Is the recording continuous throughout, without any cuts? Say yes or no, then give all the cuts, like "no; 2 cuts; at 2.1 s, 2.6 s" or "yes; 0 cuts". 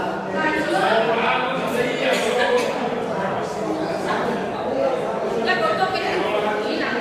yes; 0 cuts